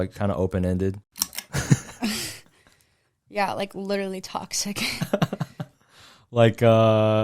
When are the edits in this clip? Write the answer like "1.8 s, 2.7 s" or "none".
1.4 s